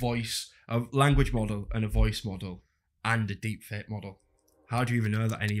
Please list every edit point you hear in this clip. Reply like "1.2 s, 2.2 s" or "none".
none